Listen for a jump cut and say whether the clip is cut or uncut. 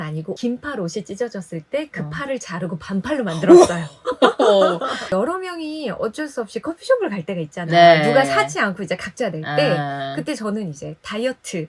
cut